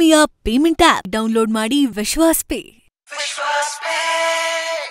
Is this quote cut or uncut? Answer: uncut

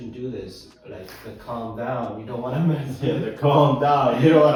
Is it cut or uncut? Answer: uncut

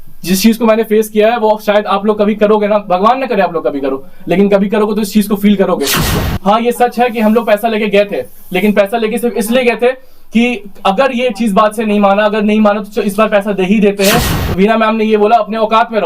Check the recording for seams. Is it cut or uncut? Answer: cut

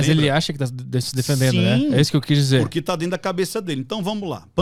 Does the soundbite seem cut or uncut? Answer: uncut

